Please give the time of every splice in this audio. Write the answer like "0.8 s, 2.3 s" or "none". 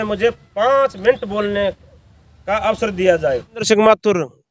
3.6 s